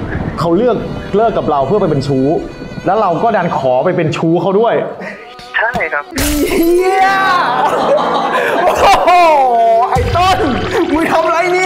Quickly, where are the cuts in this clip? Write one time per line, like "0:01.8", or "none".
none